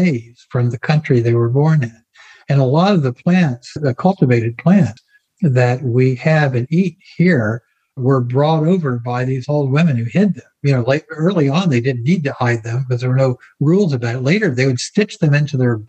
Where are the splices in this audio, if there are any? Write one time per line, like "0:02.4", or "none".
0:03.7
0:08.0